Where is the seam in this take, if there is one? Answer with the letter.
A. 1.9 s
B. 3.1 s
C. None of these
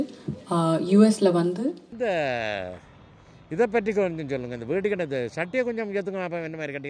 A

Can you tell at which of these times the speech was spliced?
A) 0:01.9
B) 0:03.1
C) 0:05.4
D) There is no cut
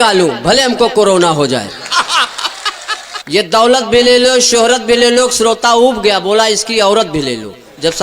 B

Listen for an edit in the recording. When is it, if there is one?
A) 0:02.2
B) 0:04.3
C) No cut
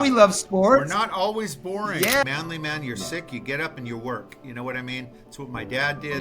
A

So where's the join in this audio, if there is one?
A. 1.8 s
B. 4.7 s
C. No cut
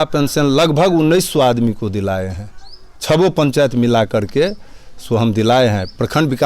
C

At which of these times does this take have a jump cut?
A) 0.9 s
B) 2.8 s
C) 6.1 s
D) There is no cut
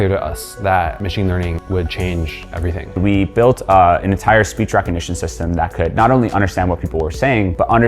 B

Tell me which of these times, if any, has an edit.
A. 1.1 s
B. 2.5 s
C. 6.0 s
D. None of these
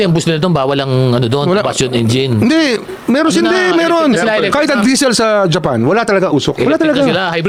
D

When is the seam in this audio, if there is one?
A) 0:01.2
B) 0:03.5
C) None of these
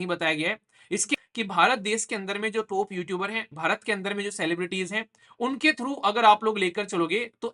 A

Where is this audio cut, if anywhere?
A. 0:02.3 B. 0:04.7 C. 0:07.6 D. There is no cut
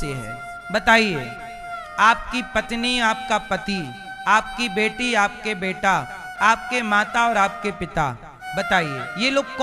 D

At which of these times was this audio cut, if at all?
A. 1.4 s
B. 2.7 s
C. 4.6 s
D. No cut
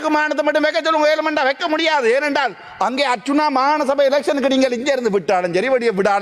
D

